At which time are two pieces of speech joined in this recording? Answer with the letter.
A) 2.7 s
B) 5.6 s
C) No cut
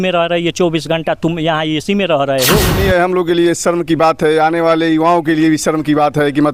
A